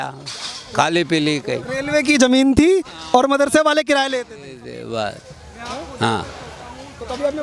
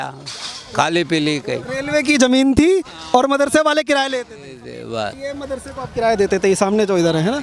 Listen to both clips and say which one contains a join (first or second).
second